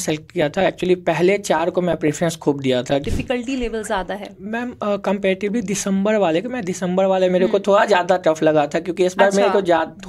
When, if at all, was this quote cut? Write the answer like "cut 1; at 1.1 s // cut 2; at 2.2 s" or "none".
cut 1; at 3.0 s